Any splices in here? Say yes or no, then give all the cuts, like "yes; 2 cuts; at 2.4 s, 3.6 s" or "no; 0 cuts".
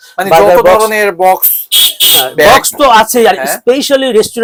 no; 0 cuts